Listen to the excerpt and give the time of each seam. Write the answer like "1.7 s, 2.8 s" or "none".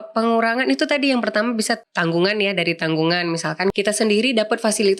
1.8 s, 3.7 s